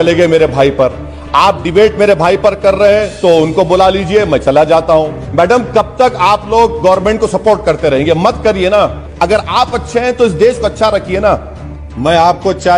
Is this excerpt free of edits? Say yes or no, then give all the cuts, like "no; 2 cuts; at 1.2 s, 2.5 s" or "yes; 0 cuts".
no; 3 cuts; at 5.2 s, 9.0 s, 11.8 s